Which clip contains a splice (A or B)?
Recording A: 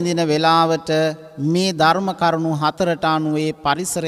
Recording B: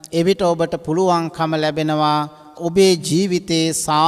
B